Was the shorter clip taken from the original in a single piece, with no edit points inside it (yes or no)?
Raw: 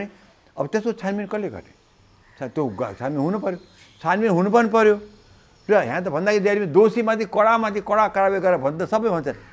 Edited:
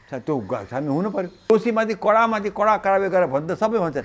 no